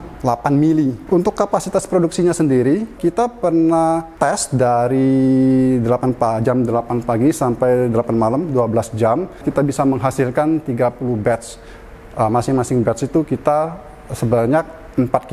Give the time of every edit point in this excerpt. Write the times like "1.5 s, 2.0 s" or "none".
1.0 s